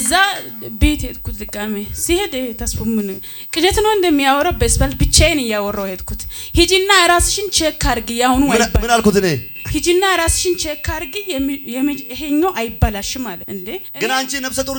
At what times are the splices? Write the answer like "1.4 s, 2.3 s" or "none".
13.8 s